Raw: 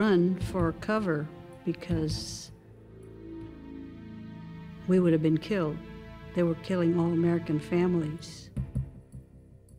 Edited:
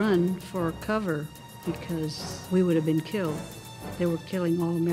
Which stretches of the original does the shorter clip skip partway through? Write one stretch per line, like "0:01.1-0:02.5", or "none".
0:02.3-0:04.7